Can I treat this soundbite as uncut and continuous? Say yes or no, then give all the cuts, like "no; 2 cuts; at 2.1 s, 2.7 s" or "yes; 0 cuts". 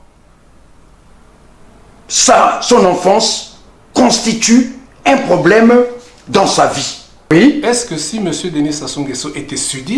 no; 1 cut; at 7.3 s